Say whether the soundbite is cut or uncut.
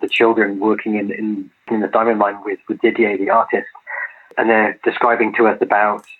uncut